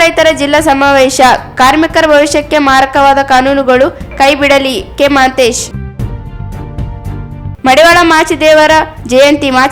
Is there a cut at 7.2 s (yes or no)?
yes